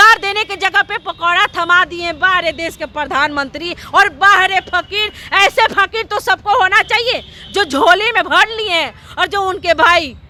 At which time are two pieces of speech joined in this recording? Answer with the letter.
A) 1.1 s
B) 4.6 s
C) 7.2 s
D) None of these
D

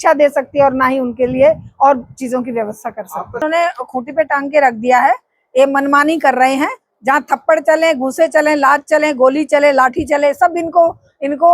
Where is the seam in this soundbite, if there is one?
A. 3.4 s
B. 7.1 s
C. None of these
A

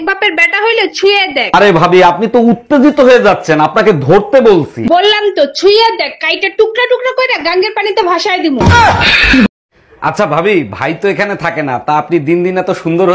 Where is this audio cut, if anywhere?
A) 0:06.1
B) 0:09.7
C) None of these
B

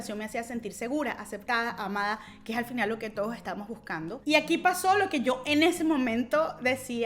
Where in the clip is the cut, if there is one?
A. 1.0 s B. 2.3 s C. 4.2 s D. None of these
C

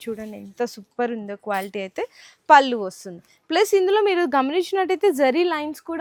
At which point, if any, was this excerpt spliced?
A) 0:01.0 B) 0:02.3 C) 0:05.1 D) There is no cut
D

